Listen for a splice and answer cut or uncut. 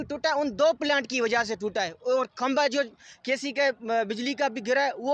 uncut